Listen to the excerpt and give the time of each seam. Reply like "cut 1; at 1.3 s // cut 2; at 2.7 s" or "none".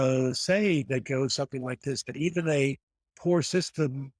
none